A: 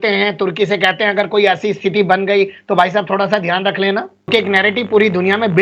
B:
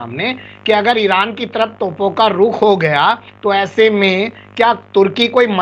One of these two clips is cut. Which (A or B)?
A